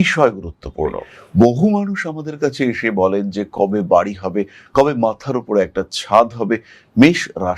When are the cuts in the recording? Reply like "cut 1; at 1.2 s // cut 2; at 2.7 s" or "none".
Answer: cut 1; at 1.1 s